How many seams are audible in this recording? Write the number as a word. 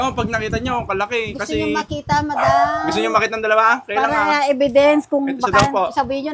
zero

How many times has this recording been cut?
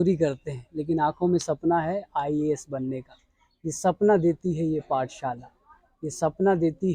zero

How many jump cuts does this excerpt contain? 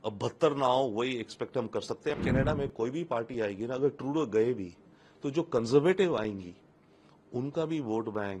one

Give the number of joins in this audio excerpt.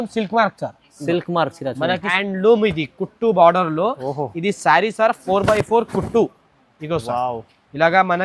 one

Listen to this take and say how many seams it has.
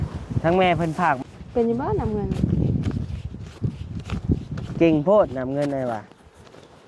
one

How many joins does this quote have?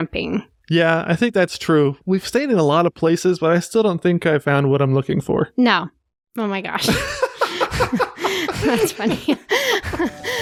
zero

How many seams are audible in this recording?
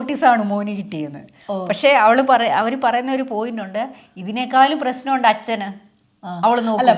zero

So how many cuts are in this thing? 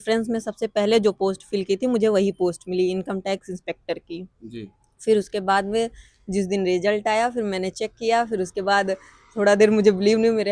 zero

